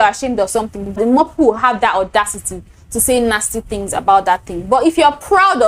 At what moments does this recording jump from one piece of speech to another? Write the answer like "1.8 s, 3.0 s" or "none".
0.9 s

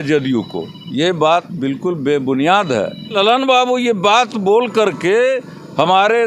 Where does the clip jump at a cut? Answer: 3.1 s

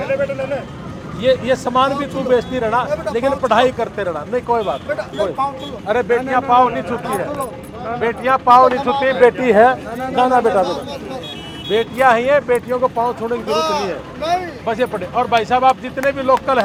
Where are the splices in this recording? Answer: none

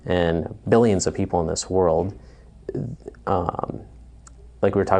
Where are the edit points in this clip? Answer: none

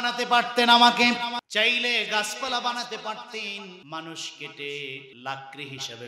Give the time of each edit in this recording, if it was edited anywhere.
1.5 s, 3.8 s, 5.1 s

